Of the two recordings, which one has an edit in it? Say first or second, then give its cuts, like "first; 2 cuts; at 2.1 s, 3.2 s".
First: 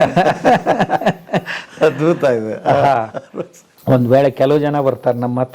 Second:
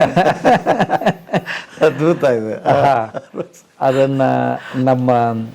first; 1 cut; at 3.6 s